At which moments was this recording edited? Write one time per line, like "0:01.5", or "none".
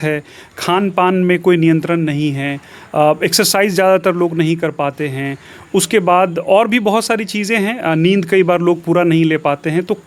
none